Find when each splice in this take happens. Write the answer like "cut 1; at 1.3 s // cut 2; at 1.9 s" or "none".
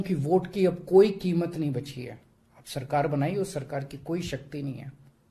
none